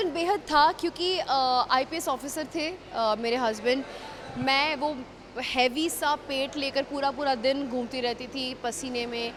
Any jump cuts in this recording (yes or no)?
no